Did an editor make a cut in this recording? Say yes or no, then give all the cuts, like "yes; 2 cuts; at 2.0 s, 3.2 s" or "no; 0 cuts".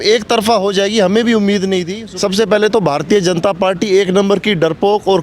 yes; 1 cut; at 2.0 s